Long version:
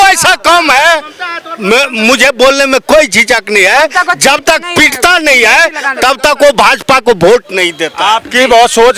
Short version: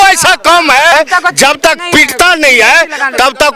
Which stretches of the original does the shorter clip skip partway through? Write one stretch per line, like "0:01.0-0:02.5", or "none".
0:00.9-0:03.8

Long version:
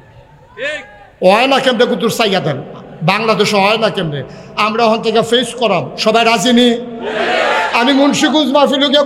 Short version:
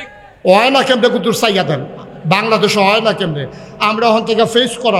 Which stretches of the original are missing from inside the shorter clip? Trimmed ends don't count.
none

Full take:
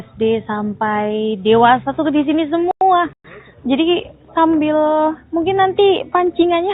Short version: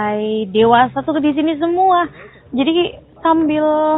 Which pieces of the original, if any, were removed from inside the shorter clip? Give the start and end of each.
0:02.8-0:03.0

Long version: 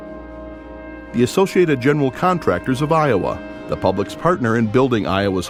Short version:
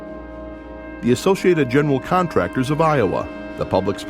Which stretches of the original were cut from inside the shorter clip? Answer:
0:01.0-0:01.1

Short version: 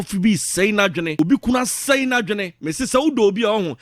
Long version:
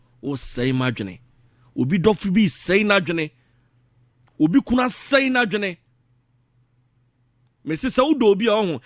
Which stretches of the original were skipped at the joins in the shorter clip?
0:03.3-0:04.4
0:05.8-0:07.6

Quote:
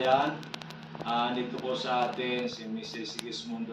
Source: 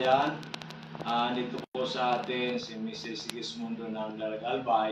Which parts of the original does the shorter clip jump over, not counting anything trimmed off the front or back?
0:01.6-0:01.7

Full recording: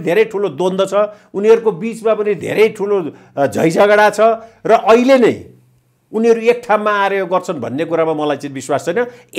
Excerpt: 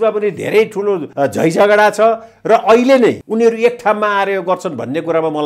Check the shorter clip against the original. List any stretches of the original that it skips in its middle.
0:03.1-0:03.3
0:05.4-0:06.1

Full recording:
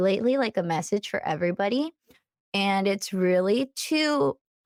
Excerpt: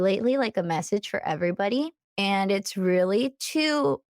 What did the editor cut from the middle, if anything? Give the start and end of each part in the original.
0:02.0-0:02.4

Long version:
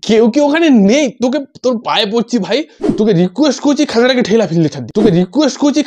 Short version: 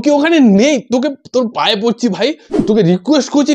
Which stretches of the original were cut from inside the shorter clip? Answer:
0:02.9-0:04.9

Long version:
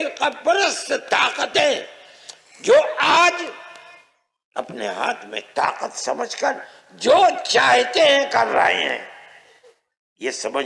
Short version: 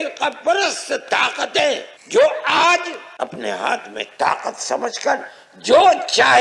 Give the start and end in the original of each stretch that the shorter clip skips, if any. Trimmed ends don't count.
0:01.9-0:02.5
0:03.5-0:04.4

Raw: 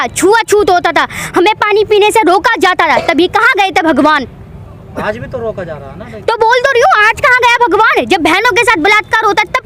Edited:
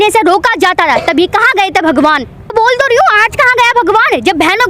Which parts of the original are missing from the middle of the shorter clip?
0:04.5-0:06.4

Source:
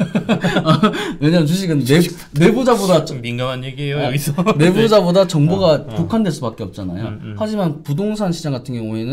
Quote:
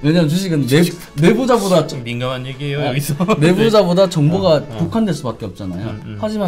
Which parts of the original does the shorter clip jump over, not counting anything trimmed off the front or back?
none

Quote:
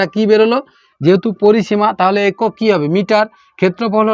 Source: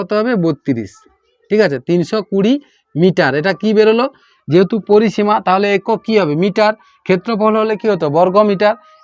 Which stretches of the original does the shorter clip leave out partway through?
none

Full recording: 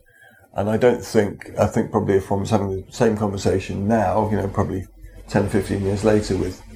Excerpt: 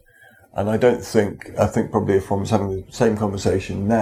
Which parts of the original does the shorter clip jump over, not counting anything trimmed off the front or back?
none

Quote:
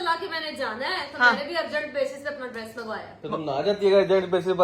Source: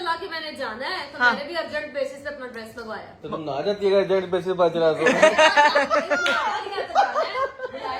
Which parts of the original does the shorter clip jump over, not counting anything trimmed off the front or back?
none

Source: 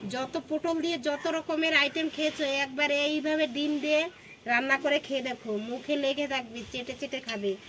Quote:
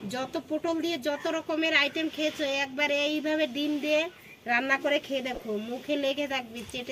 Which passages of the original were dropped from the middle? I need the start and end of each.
none

